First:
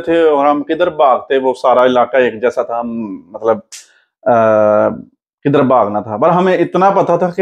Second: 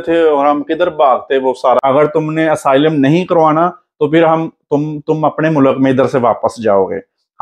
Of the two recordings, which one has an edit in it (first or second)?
second